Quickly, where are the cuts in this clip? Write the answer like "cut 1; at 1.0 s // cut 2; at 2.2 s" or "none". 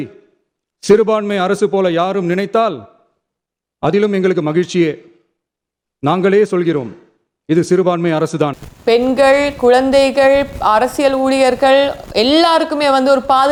none